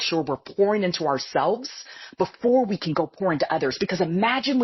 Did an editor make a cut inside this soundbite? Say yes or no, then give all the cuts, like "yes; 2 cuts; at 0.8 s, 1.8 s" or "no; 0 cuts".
no; 0 cuts